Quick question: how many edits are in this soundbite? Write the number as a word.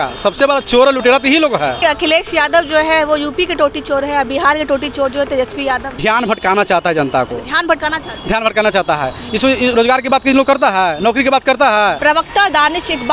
three